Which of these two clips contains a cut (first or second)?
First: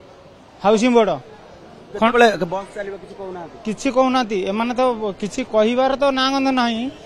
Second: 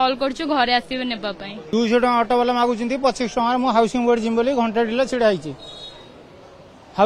second